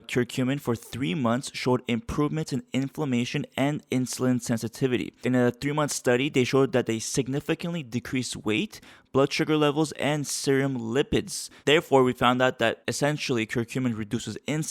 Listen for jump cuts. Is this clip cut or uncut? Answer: cut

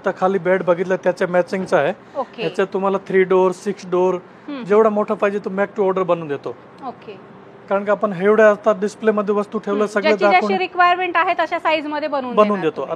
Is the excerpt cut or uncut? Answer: uncut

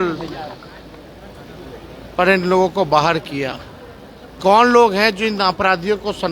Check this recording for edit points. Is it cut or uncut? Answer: uncut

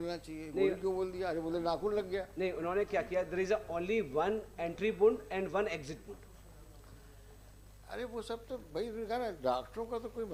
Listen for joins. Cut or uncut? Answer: uncut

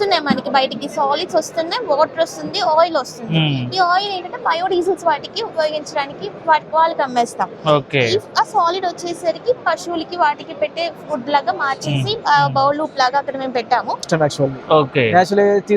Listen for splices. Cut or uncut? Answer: cut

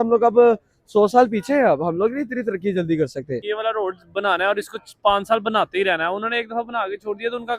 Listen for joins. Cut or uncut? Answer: cut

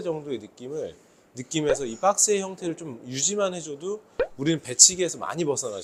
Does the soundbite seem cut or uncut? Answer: uncut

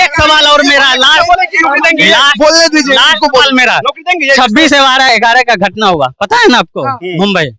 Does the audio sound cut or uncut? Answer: uncut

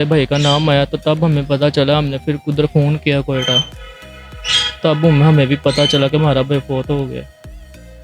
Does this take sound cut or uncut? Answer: uncut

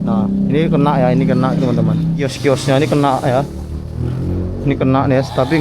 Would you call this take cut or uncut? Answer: cut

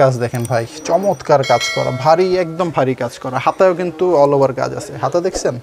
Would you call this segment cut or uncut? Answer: uncut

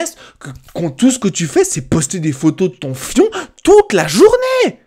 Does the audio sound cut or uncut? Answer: uncut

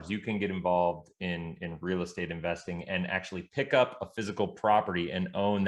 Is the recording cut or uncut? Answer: uncut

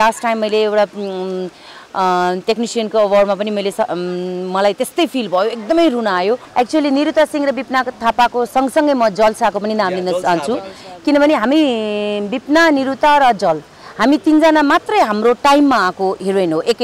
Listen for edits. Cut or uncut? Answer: cut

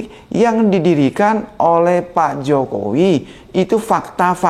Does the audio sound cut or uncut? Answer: uncut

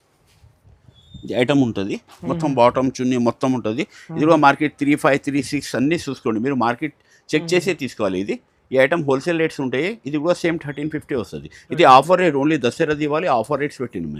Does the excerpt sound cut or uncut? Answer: uncut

